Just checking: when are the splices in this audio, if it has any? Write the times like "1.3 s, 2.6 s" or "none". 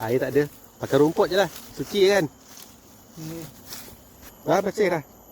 4.2 s